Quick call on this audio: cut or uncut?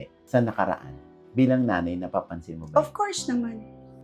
uncut